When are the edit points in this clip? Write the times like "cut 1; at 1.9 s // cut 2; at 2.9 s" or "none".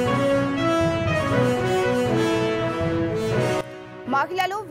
cut 1; at 3.7 s